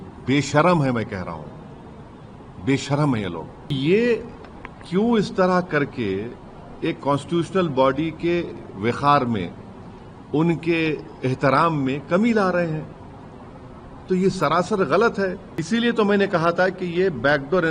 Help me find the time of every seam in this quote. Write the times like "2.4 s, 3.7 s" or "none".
3.7 s, 15.5 s

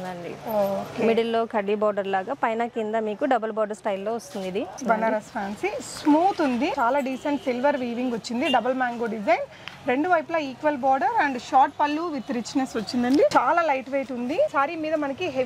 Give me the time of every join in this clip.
4.8 s, 6.7 s, 13.3 s

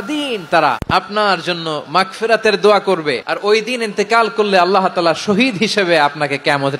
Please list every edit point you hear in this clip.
0.8 s, 3.3 s

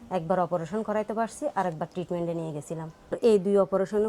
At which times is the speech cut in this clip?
3.2 s

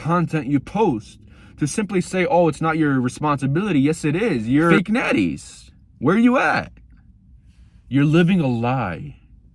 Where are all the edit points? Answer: 4.8 s

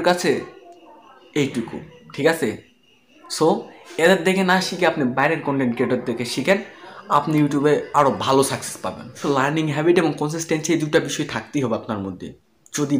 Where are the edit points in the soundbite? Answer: 9.2 s

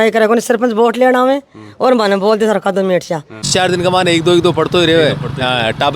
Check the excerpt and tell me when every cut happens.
3.5 s

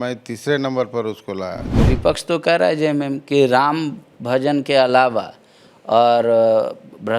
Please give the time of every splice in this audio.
1.9 s

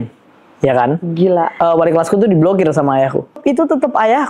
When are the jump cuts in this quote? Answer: 1.5 s, 3.4 s

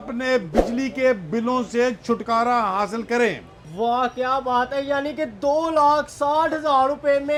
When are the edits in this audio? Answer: none

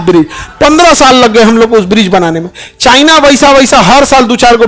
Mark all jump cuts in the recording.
none

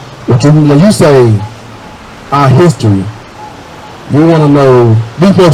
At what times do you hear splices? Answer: none

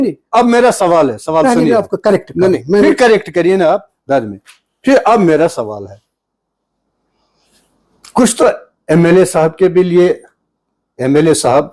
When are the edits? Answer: none

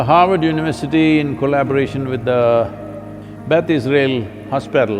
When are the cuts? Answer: none

